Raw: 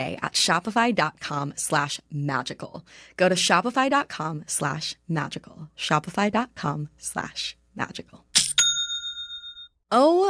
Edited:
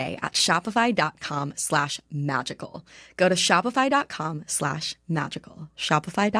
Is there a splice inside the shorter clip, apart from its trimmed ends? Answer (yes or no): no